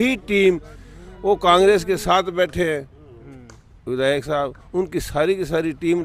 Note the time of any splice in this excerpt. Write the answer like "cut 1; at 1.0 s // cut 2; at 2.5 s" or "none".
none